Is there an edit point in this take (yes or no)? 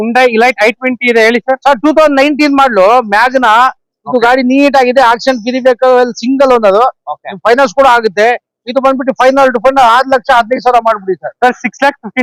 no